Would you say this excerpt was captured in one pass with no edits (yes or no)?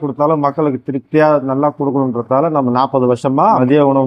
yes